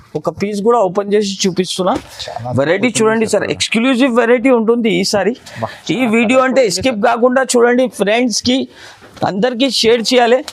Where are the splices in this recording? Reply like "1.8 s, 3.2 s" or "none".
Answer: none